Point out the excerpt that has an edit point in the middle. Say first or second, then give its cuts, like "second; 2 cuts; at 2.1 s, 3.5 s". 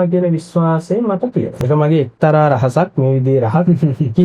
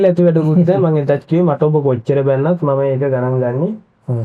first; 1 cut; at 1.6 s